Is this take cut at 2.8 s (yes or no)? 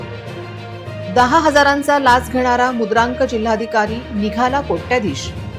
no